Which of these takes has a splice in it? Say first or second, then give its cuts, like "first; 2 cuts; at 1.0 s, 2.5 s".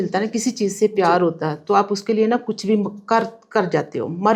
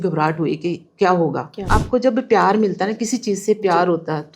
second; 1 cut; at 1.6 s